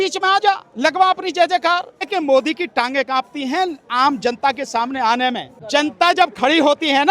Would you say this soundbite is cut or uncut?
cut